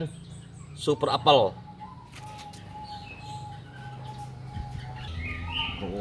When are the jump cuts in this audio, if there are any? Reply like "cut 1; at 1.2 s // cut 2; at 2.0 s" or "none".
cut 1; at 5.1 s